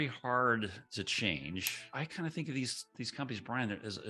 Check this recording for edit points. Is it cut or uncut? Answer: cut